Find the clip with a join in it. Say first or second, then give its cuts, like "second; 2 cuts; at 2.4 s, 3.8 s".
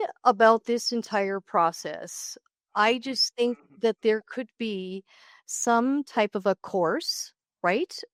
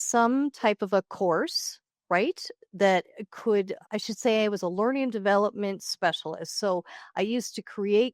second; 1 cut; at 3.8 s